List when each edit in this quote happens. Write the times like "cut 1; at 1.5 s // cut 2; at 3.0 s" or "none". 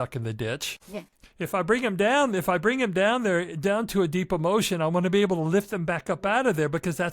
cut 1; at 1.2 s

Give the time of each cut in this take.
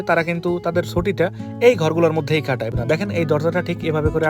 cut 1; at 2.7 s

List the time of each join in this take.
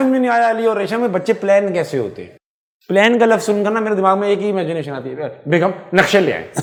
none

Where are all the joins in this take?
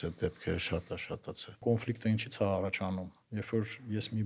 cut 1; at 1.6 s

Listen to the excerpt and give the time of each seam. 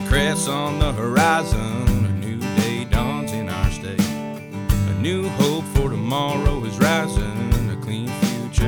none

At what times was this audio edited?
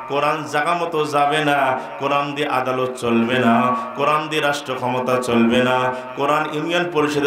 none

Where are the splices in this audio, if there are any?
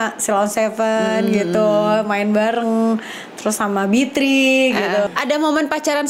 cut 1; at 5.1 s

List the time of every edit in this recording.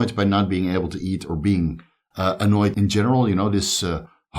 cut 1; at 2.7 s

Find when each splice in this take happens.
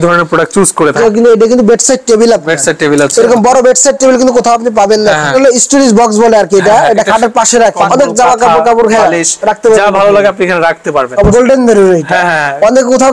cut 1; at 1.0 s // cut 2; at 5.3 s // cut 3; at 7.8 s // cut 4; at 11.3 s

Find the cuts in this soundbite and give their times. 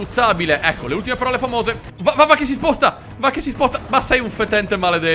cut 1; at 1.9 s

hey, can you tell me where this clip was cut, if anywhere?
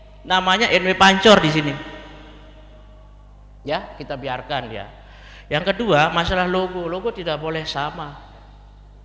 none

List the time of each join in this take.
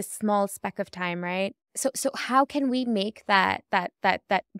cut 1; at 1.6 s

